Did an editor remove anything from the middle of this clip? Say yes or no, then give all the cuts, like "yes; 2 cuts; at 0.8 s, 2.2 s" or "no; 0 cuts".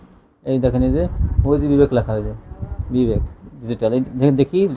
no; 0 cuts